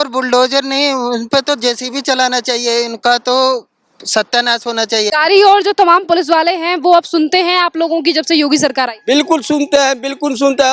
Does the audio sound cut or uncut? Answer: cut